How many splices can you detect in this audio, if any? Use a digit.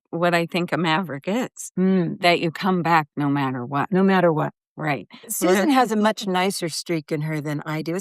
1